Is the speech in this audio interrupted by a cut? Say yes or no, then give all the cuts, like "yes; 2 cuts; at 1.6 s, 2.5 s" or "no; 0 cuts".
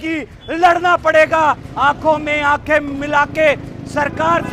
no; 0 cuts